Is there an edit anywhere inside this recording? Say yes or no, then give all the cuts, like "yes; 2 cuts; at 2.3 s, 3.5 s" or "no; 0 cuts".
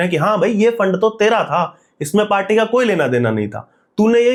no; 0 cuts